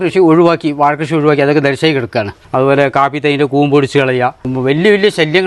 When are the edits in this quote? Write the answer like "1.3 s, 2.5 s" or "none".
2.4 s, 4.5 s

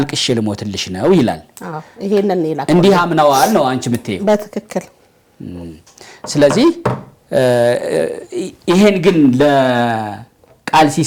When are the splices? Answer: none

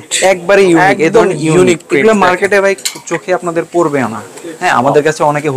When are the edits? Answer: none

